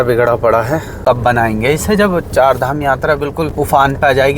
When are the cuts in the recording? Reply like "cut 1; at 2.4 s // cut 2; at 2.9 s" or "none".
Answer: cut 1; at 0.9 s // cut 2; at 3.5 s